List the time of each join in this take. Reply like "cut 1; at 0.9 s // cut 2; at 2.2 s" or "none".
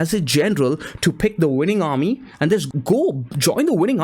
cut 1; at 2.7 s